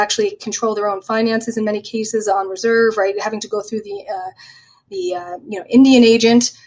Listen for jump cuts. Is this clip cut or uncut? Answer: uncut